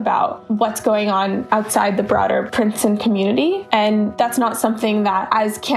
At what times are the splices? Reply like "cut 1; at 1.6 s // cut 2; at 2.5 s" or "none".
none